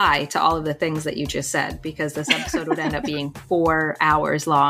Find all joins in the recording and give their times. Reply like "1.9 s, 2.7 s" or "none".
none